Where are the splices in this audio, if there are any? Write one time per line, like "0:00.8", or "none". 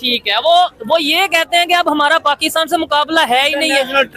none